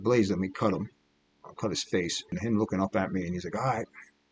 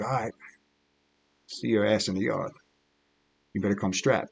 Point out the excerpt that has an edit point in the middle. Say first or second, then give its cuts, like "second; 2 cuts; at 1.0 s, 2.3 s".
first; 1 cut; at 2.3 s